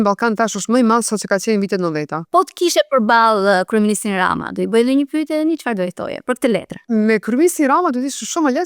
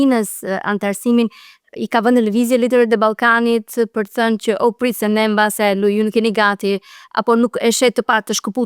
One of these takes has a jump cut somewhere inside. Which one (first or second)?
first